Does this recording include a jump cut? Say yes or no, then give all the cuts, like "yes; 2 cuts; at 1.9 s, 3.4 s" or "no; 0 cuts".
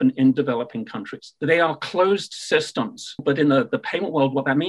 yes; 2 cuts; at 1.3 s, 3.2 s